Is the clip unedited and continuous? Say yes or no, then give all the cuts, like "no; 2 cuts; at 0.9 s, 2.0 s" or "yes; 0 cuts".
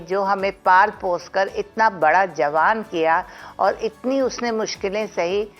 yes; 0 cuts